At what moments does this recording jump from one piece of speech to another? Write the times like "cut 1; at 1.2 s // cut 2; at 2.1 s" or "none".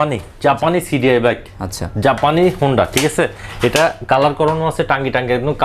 none